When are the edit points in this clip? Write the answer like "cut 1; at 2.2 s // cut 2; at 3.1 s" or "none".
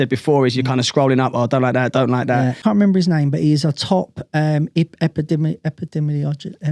cut 1; at 2.6 s